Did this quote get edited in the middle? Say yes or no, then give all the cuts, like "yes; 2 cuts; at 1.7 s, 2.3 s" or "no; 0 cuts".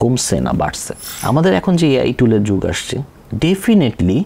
yes; 1 cut; at 1.1 s